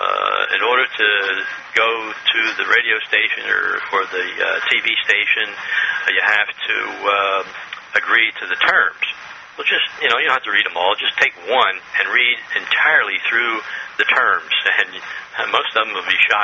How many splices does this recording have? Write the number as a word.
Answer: one